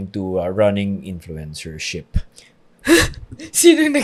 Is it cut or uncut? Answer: uncut